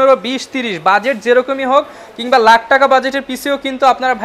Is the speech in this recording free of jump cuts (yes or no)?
yes